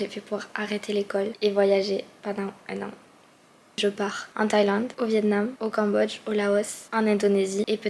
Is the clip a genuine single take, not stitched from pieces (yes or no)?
no